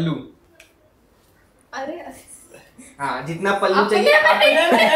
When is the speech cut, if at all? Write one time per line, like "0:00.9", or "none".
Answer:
none